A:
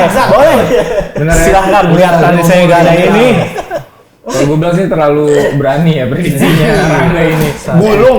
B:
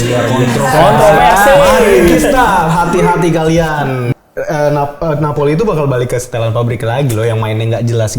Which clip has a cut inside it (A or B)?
B